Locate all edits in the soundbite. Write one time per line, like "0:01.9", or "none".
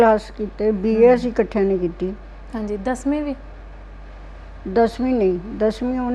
none